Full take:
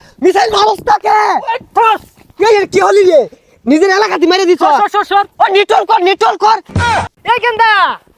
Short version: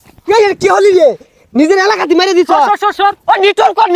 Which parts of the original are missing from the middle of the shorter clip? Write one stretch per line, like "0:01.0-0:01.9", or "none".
none